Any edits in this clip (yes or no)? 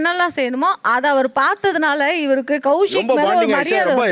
no